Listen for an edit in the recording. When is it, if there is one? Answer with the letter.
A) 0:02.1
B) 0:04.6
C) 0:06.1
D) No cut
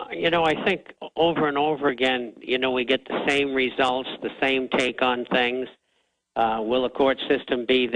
A